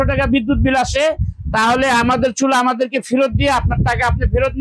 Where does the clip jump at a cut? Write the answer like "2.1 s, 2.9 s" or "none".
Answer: none